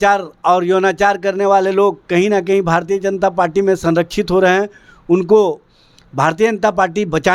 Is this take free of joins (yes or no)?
yes